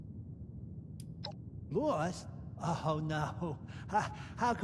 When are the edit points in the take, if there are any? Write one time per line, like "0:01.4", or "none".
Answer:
0:01.7